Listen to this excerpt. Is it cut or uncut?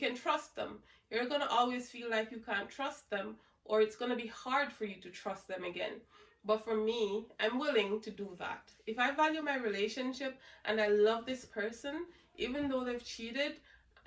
uncut